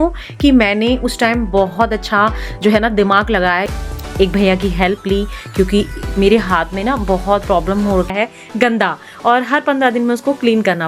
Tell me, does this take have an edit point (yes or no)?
yes